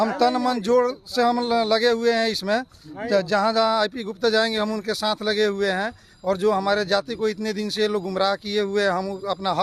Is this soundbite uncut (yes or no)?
yes